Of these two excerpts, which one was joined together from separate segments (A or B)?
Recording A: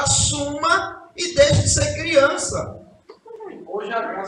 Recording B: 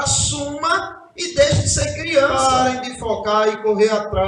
B